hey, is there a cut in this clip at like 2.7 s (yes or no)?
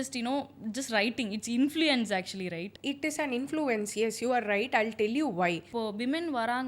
yes